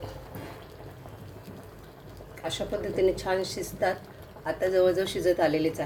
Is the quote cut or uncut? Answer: uncut